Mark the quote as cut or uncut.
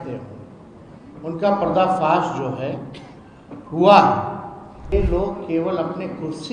cut